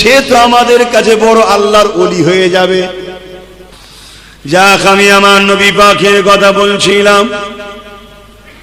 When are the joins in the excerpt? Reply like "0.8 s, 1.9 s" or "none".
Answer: 3.7 s